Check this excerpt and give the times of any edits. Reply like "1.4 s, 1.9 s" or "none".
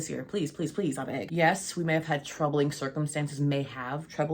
1.2 s

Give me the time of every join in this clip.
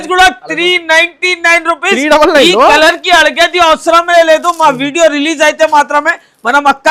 none

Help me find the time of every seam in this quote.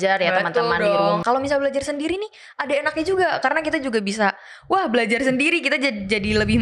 1.2 s

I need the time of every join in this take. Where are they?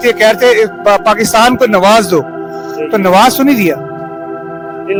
none

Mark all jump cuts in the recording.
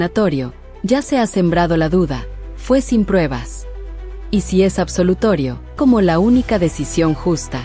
5.7 s

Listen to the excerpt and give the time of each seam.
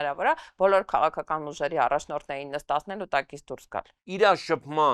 3.8 s

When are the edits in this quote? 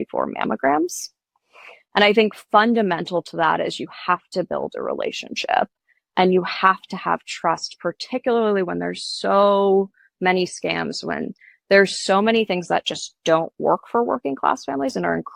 none

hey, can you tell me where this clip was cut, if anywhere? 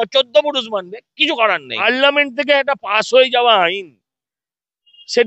1.8 s

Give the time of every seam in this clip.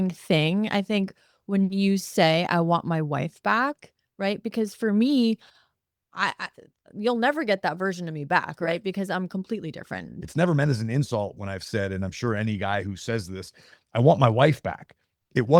10.1 s

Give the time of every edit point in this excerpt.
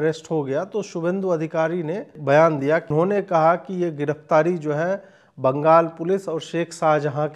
2.2 s, 2.9 s

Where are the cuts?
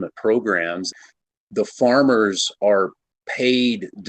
1.0 s

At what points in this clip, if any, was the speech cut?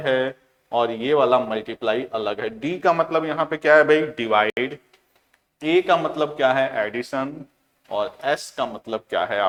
none

